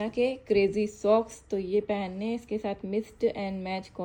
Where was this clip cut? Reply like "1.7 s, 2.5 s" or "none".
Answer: none